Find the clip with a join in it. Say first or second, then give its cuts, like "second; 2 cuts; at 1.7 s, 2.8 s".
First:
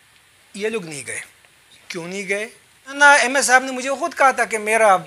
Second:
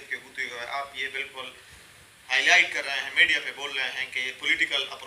first; 1 cut; at 2.9 s